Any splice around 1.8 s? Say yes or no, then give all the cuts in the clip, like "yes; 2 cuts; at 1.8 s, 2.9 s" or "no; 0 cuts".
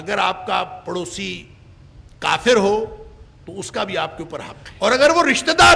no; 1 cut; at 4.6 s